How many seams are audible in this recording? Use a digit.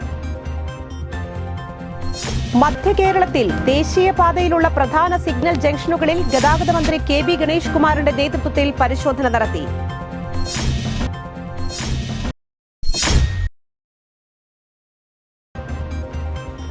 1